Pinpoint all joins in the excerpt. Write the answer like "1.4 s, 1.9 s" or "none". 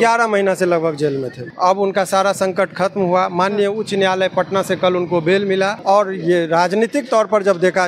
1.4 s, 5.8 s